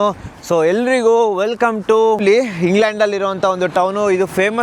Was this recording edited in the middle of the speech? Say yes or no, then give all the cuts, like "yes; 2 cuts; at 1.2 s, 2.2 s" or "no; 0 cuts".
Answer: yes; 1 cut; at 2.2 s